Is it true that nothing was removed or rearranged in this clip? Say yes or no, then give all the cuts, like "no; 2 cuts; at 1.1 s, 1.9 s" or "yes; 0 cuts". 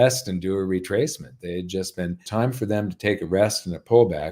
no; 1 cut; at 2.2 s